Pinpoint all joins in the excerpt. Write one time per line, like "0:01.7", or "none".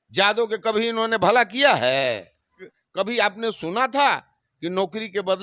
0:02.6